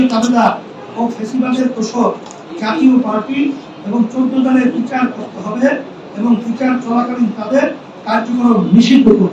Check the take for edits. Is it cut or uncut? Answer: uncut